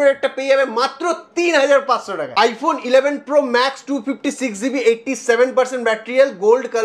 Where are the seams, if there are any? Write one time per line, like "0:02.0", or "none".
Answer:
0:02.2